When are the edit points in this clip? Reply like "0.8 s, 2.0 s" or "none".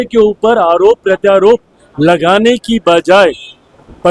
none